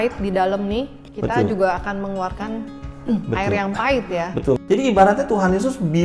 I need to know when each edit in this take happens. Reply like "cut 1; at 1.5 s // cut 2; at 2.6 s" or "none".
cut 1; at 4.6 s